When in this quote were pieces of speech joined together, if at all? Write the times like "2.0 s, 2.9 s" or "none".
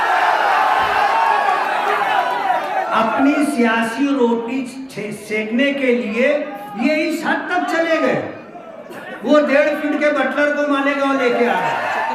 none